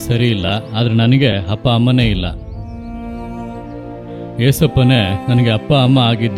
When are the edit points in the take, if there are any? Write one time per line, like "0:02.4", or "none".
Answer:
0:02.4
0:04.3